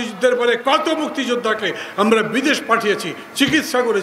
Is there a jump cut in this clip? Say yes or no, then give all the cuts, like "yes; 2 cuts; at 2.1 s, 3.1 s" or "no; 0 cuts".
no; 0 cuts